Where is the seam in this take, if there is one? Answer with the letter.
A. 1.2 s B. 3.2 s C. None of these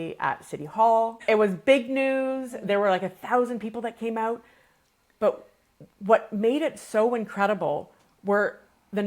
A